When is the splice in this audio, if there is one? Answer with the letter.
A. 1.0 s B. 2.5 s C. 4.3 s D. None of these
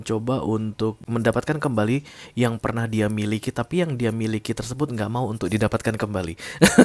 A